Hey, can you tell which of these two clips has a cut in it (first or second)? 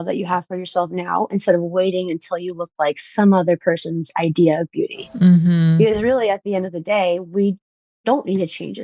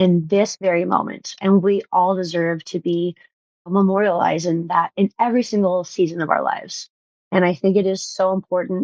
second